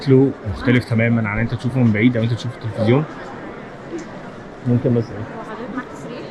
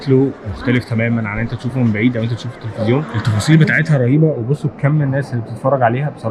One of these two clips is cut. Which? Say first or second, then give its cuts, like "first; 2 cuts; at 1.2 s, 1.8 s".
second; 1 cut; at 3.2 s